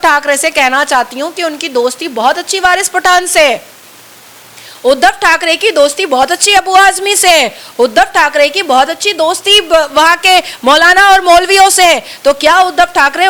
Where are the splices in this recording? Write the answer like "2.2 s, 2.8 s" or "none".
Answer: none